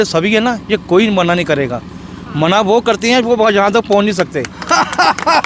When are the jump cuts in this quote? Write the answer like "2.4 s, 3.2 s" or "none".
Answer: none